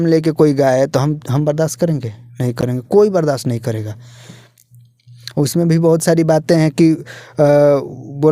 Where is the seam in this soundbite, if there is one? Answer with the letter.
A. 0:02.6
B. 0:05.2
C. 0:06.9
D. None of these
D